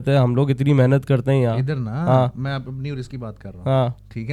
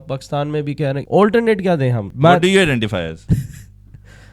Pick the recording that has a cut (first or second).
second